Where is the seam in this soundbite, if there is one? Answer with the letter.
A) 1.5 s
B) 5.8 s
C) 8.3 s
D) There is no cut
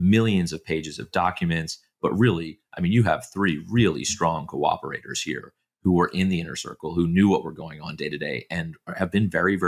D